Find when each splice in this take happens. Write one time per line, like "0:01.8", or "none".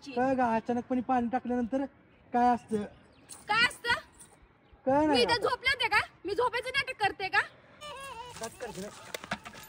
0:07.8

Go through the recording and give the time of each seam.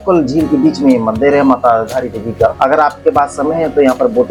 none

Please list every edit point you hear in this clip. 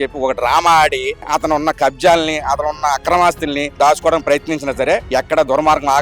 0:01.2
0:03.7
0:05.0

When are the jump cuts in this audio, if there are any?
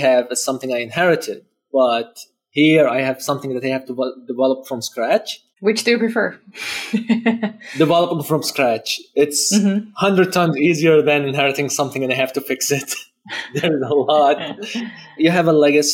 none

